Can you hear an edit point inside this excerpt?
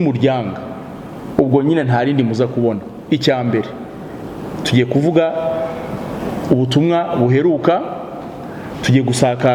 no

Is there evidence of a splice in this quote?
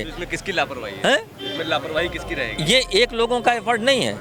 no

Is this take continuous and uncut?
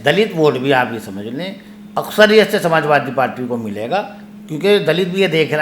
yes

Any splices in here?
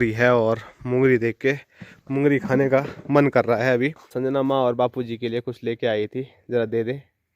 yes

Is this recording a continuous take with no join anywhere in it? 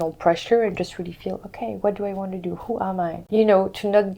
no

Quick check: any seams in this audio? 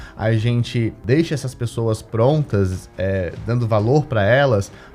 yes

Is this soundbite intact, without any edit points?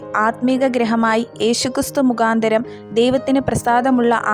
yes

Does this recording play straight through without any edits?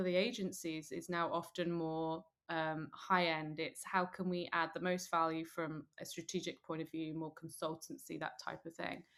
yes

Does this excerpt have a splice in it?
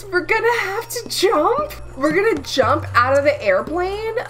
yes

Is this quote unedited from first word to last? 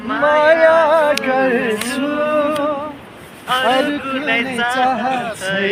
yes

